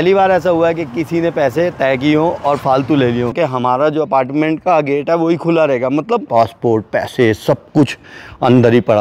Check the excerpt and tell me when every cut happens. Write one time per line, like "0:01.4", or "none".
0:03.4
0:06.3